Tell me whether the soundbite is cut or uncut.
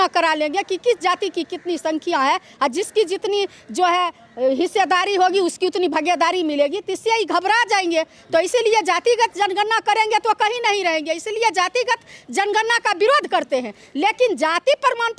uncut